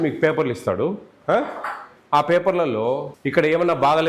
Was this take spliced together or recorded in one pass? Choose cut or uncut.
cut